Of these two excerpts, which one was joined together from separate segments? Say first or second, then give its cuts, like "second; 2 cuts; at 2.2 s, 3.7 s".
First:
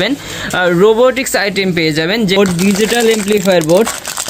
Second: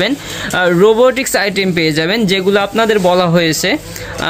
first; 1 cut; at 2.4 s